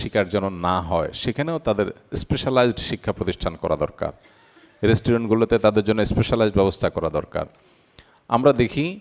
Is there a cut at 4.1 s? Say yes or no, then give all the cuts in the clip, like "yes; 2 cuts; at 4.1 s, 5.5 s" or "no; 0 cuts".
no; 0 cuts